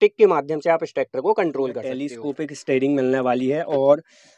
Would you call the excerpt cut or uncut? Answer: cut